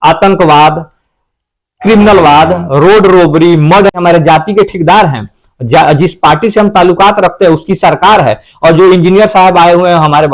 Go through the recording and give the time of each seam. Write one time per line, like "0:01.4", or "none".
0:04.0